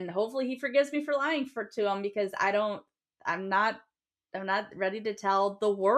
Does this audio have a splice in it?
no; 0 cuts

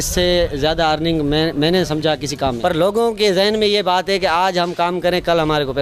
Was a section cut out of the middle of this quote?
yes; 1 cut; at 2.6 s

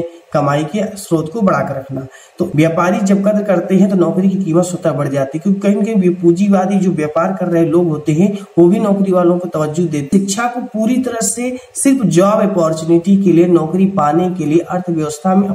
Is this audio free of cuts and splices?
no; 2 cuts; at 2.5 s, 10.1 s

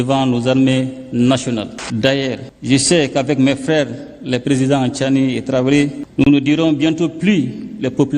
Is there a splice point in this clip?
yes; 1 cut; at 1.8 s

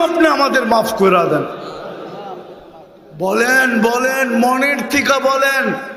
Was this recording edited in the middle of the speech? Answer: no; 0 cuts

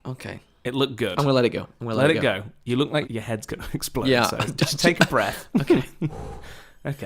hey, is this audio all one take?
no; 1 cut; at 3.0 s

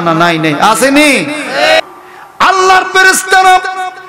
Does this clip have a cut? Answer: yes; 1 cut; at 1.8 s

